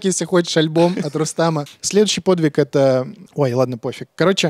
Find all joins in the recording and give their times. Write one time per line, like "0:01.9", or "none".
0:01.7
0:03.2